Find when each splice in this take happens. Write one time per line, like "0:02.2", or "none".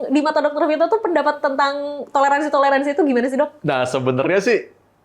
none